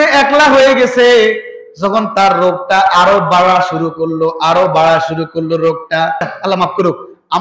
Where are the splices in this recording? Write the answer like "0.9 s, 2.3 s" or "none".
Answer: 6.3 s